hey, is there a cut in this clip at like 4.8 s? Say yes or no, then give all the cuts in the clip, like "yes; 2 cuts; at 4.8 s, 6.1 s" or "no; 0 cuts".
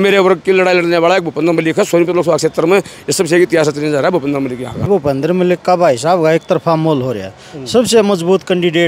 yes; 1 cut; at 4.8 s